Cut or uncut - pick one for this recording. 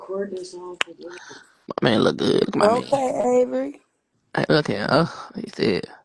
uncut